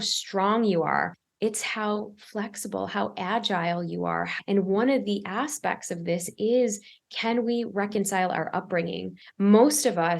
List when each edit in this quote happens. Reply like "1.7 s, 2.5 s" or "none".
1.2 s, 4.3 s, 9.2 s